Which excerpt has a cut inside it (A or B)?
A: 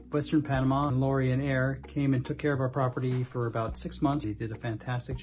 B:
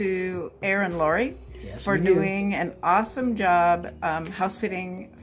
A